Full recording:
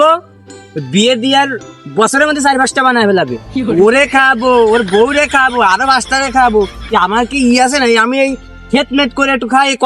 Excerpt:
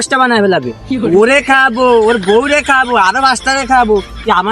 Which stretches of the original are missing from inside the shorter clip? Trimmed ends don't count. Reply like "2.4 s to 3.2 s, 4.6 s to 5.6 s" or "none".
none